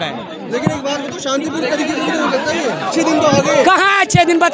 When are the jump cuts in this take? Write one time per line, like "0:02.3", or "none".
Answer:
0:02.9